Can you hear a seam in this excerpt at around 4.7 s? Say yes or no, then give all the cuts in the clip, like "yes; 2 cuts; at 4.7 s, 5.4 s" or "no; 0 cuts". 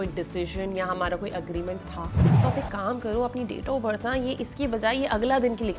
no; 1 cut; at 2.2 s